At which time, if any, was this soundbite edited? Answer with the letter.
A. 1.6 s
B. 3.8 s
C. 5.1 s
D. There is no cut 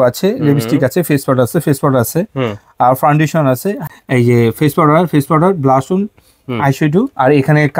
B